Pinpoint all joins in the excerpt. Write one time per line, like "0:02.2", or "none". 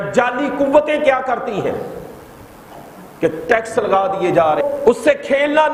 0:04.6